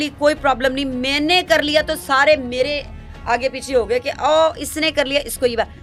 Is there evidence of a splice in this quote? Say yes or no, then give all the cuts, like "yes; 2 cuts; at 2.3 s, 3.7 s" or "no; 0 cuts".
no; 0 cuts